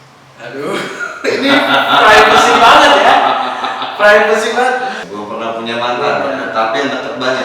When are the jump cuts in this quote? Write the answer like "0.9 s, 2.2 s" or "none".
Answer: 5.0 s